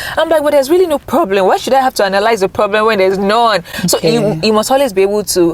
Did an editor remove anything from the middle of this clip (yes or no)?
no